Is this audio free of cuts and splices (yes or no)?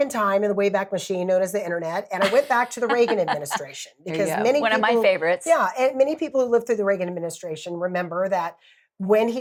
yes